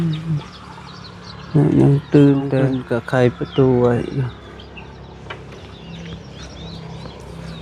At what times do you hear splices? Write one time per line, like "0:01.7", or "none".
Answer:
0:02.8